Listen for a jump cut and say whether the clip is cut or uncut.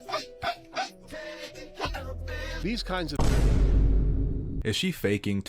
cut